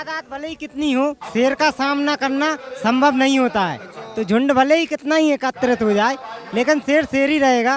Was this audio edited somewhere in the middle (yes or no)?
no